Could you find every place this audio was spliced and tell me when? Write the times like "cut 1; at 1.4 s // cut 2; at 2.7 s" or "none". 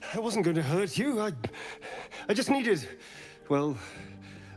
none